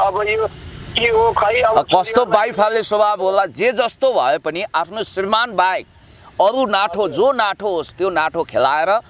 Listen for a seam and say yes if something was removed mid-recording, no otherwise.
no